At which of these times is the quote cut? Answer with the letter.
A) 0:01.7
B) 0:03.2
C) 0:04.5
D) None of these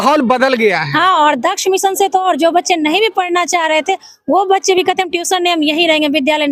D